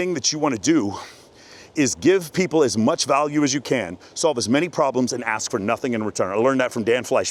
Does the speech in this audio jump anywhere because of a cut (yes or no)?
no